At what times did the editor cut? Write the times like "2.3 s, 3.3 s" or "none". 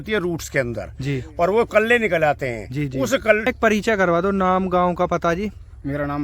3.5 s